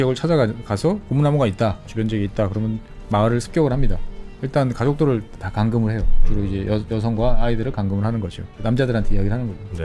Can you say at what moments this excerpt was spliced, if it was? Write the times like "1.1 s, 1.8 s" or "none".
1.9 s, 4.4 s, 8.6 s